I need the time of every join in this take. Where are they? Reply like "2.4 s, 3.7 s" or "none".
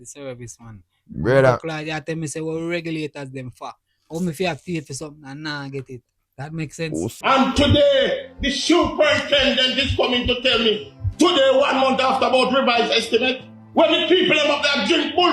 7.1 s

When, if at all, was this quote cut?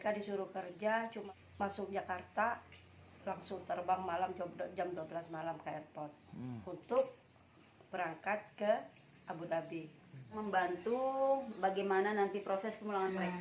1.2 s, 10.4 s

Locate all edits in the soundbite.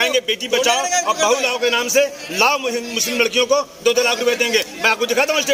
none

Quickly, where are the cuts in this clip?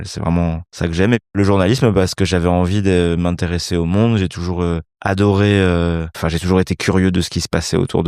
1.1 s, 4.9 s, 6.2 s

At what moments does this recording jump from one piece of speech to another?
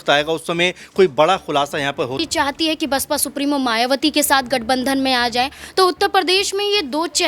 2.2 s

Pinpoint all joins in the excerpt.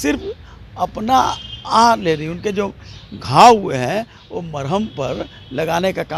none

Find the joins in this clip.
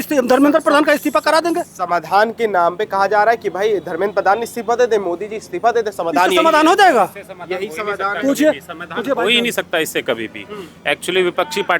none

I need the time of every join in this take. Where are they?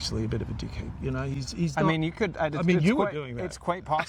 none

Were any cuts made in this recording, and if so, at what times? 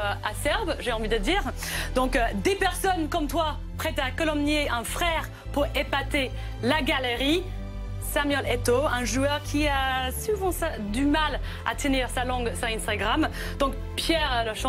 9.0 s

